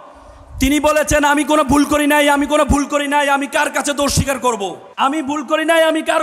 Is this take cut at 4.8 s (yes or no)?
yes